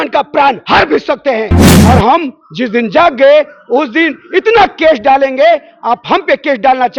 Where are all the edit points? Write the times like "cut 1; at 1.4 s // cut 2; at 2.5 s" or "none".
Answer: cut 1; at 1.7 s